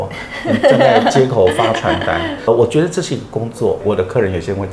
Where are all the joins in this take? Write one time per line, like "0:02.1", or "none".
0:03.8